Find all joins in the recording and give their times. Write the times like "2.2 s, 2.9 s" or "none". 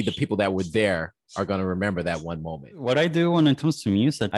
2.6 s